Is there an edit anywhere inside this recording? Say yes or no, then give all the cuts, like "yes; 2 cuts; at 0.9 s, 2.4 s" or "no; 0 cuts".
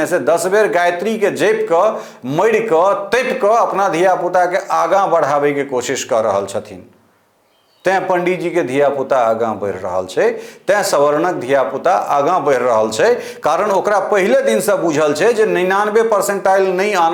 no; 0 cuts